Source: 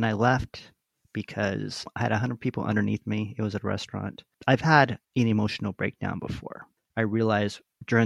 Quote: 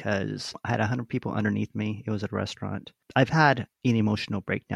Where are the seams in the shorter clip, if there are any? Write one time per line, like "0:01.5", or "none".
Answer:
none